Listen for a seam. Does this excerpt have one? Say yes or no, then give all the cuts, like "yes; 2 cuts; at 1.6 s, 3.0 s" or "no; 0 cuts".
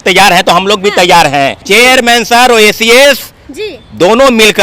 yes; 1 cut; at 1.7 s